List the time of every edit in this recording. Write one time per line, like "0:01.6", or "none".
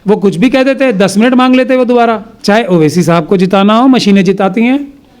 0:02.3

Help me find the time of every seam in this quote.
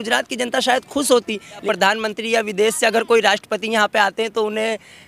0:01.6

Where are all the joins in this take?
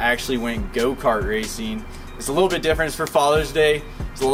none

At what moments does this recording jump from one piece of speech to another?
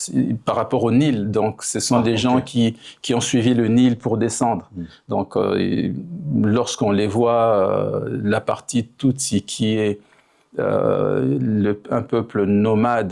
none

